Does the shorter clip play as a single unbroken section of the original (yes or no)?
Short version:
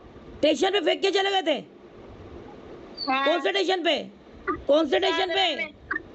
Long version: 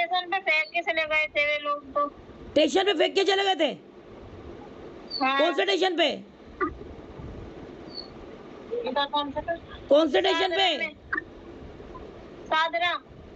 no